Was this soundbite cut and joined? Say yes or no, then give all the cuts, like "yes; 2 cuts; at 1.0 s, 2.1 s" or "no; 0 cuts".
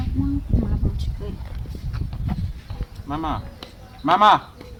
no; 0 cuts